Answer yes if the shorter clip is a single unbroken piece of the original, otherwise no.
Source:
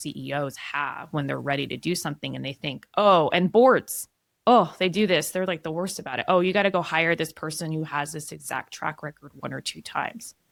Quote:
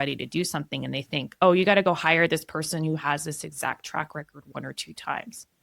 no